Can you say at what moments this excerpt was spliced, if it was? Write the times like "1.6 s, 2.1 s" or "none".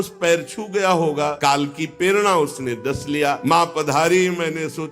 1.3 s, 3.4 s